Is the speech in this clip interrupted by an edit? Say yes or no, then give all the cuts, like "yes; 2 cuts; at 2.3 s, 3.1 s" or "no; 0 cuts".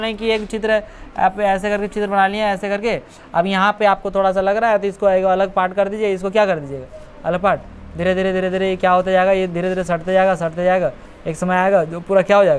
no; 0 cuts